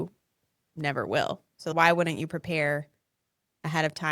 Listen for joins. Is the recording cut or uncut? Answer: cut